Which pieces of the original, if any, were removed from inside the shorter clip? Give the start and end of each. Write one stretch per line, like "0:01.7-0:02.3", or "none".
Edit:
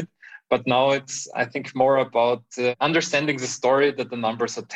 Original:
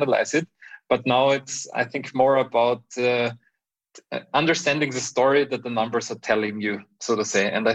0:03.1-0:04.3